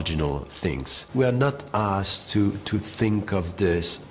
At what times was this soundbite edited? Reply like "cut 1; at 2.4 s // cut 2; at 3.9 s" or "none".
cut 1; at 1.0 s